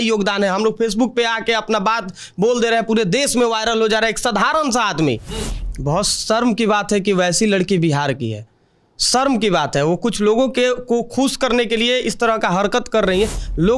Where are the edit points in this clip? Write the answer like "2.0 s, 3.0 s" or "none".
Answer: 5.5 s